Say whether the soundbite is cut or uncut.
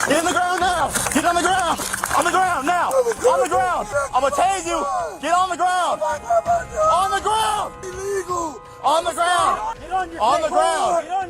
uncut